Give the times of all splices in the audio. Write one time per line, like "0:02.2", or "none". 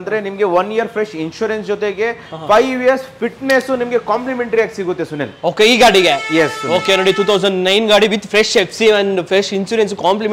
none